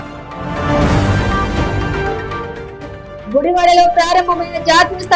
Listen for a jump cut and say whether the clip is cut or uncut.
uncut